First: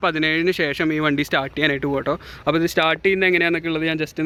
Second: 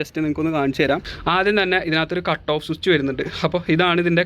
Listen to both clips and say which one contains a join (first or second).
second